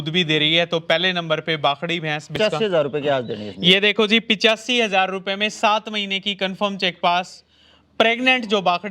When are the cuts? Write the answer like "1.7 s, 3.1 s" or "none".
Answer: 2.4 s